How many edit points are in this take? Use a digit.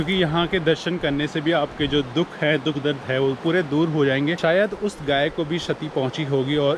1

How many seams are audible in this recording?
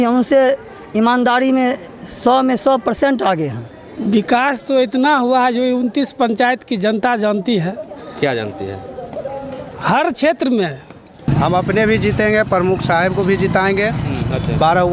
2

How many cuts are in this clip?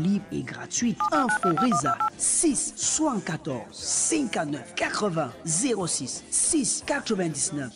0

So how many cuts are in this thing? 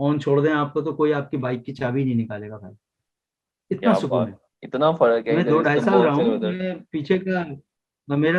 0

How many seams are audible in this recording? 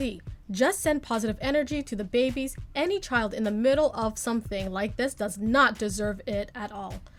0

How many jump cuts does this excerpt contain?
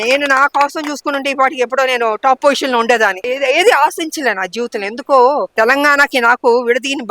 2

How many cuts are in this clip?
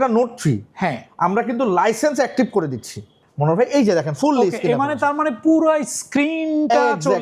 0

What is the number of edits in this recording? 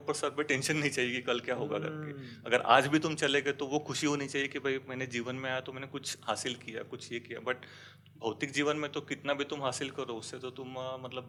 0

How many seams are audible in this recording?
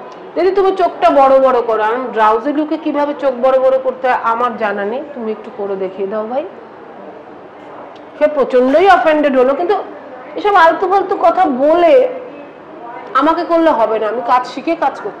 0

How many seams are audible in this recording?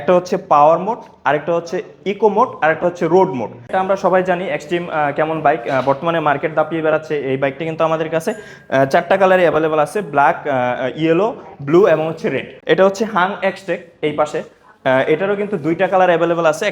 2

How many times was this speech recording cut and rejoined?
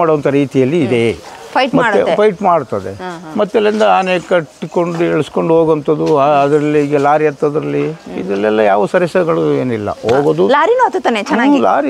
0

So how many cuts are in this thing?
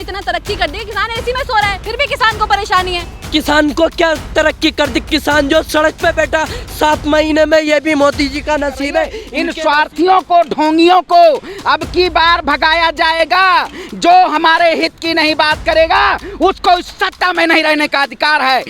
1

